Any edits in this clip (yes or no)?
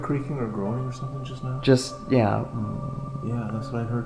no